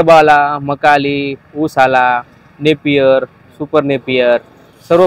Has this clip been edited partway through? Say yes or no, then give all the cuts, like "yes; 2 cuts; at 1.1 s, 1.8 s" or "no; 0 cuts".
no; 0 cuts